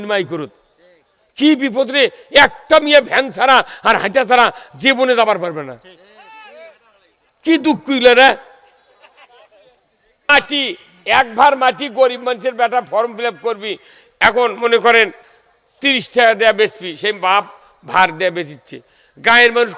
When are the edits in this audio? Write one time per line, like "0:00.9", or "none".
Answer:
0:10.3